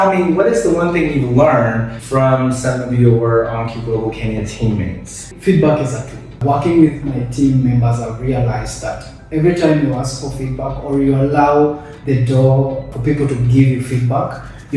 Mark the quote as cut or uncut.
cut